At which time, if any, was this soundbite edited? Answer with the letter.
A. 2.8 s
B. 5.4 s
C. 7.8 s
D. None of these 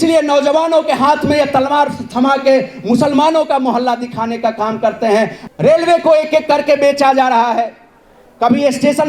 B